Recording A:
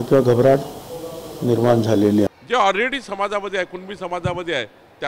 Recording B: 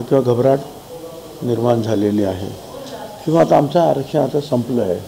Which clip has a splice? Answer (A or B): A